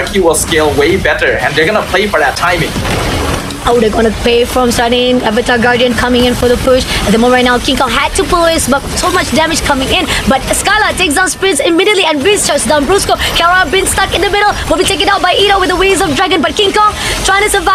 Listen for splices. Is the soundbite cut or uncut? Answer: uncut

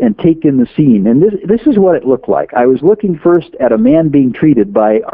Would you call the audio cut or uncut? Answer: uncut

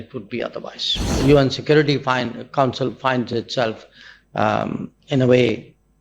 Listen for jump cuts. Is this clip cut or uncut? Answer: cut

